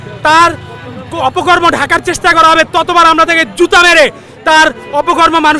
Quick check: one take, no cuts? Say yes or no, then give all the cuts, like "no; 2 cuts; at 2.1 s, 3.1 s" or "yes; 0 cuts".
yes; 0 cuts